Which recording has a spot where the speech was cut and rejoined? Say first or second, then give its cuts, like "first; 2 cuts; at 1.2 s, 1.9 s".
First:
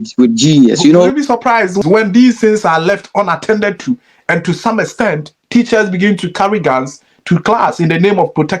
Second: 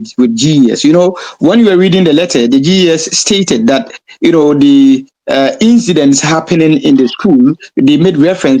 first; 1 cut; at 1.4 s